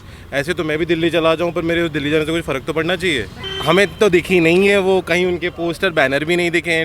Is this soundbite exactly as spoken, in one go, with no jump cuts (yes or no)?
no